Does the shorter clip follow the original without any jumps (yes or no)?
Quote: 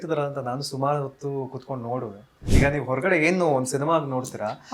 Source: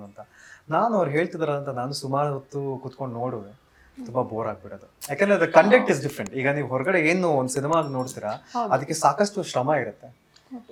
no